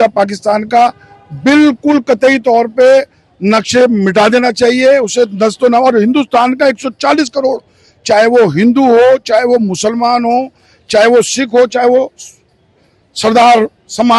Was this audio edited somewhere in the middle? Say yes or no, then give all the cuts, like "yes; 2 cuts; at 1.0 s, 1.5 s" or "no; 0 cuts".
no; 0 cuts